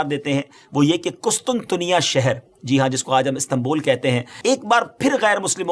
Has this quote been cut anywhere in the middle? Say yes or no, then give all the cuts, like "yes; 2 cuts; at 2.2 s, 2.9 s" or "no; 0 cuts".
yes; 1 cut; at 4.3 s